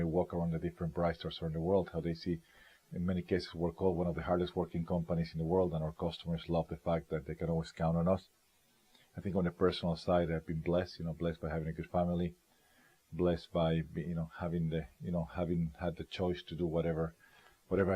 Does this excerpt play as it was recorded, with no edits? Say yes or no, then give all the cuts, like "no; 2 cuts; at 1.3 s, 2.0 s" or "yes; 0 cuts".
yes; 0 cuts